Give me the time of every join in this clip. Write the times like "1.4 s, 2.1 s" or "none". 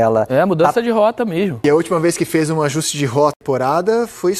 1.6 s, 3.4 s